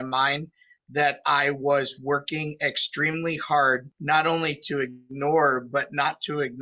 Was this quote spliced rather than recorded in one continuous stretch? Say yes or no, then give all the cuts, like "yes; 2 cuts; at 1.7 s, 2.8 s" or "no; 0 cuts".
yes; 1 cut; at 3.9 s